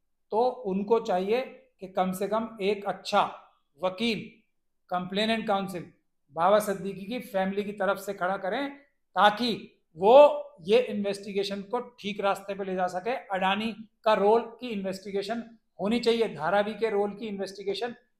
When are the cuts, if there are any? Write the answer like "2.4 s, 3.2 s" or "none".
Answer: none